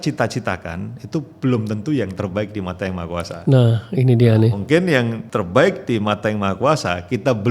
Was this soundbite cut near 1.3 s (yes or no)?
no